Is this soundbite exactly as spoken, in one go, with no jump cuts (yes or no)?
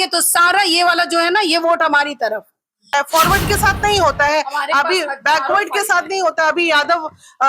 no